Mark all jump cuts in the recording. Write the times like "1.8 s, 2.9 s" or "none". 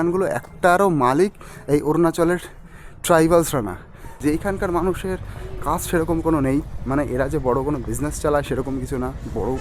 4.1 s